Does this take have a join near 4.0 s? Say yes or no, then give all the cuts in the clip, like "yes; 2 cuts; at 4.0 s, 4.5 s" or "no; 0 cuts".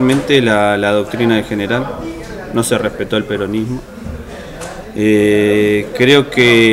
no; 0 cuts